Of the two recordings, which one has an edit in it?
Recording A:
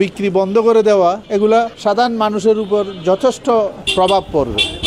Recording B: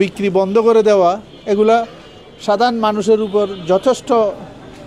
A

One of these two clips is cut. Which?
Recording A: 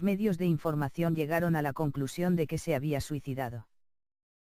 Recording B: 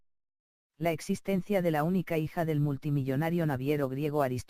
B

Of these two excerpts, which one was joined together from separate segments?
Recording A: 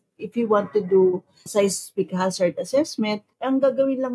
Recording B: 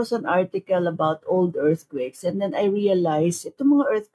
A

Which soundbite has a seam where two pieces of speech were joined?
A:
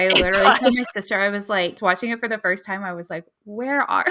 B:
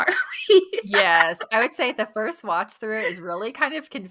A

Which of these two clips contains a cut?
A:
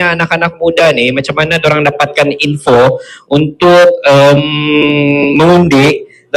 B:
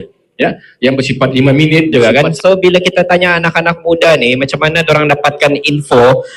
B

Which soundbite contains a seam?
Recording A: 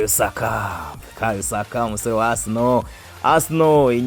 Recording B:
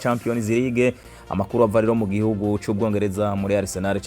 B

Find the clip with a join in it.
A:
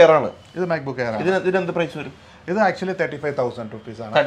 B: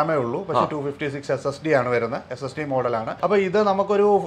B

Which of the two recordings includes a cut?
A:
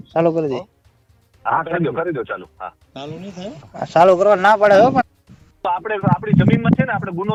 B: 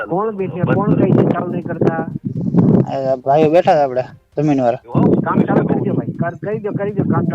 B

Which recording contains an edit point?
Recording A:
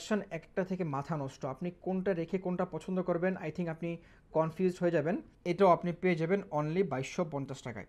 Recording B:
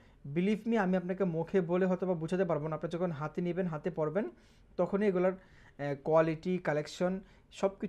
A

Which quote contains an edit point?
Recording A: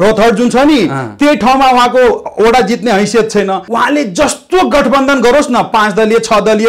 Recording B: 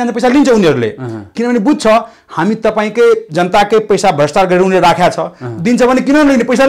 A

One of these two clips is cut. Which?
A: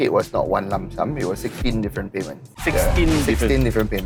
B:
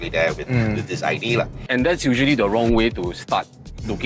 B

